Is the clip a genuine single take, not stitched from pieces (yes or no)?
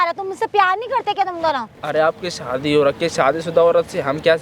no